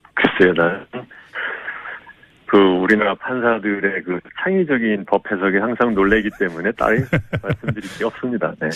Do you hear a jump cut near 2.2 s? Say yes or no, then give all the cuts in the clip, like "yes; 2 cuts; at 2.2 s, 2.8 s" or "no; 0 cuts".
no; 1 cut; at 4.3 s